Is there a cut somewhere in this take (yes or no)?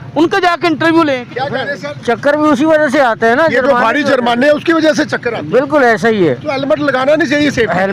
yes